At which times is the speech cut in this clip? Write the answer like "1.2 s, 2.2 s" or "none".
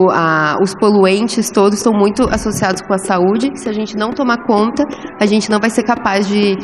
none

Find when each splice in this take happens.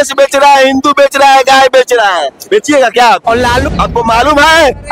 3.7 s

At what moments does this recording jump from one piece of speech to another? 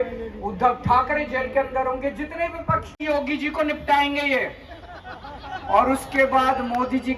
2.9 s

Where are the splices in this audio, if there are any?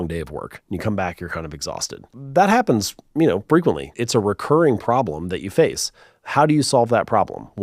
2.2 s, 4.0 s

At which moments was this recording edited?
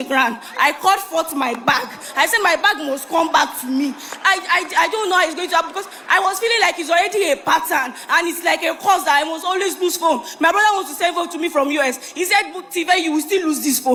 none

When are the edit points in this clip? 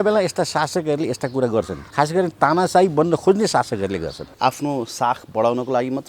1.8 s, 4.2 s

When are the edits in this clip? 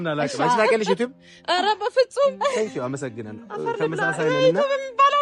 none

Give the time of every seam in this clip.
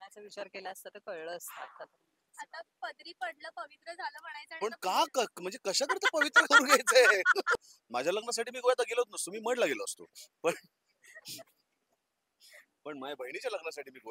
7.6 s

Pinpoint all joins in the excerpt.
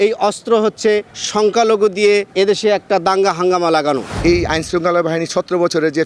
1.2 s, 2.3 s, 4.1 s

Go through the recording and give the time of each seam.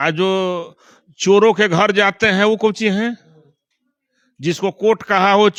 none

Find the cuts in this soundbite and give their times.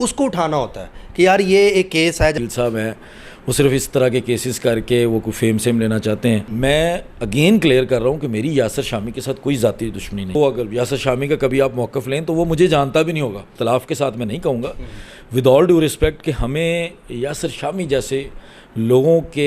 2.3 s, 6.5 s, 10.3 s, 13.5 s

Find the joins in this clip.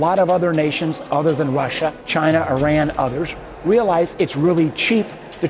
2.0 s

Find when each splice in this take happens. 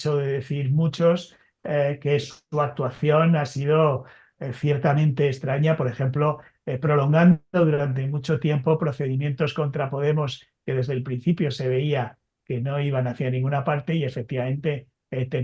none

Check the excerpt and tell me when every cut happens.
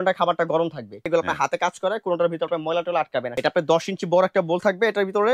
1.1 s, 3.3 s

